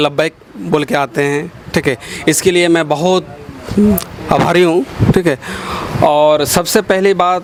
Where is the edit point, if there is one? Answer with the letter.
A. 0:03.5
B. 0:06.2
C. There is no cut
C